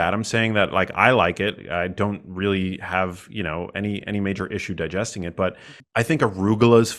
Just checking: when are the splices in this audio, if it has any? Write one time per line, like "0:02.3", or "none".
0:05.7